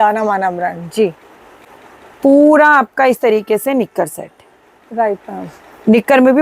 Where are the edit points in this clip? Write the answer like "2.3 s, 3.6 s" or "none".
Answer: none